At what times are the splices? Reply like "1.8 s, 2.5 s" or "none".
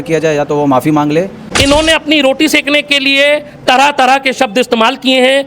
1.4 s